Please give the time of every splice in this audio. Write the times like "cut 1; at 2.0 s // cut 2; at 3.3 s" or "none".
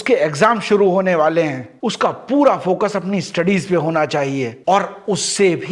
cut 1; at 4.5 s